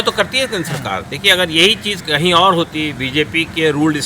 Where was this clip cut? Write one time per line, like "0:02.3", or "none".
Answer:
0:02.0
0:03.0